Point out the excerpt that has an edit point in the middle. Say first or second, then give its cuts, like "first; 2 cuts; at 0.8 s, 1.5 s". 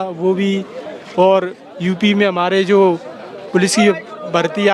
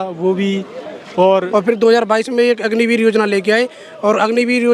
second; 1 cut; at 1.5 s